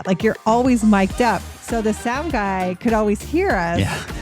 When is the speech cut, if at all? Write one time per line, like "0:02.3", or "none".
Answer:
0:01.5